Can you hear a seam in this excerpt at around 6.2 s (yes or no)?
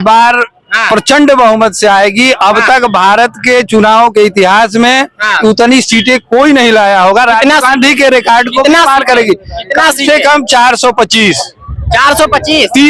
no